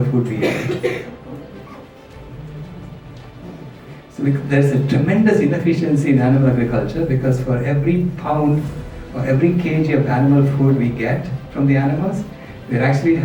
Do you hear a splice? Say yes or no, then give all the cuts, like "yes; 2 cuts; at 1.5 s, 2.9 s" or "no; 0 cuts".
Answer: no; 0 cuts